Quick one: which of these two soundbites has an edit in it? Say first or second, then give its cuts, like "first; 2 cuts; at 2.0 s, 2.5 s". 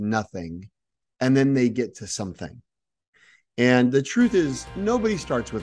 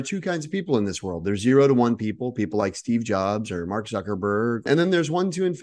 first; 1 cut; at 4.7 s